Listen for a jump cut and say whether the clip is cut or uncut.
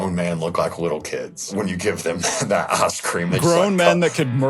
cut